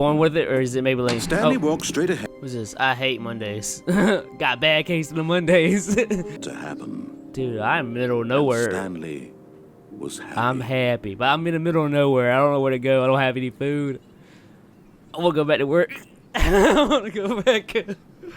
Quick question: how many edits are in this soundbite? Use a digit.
2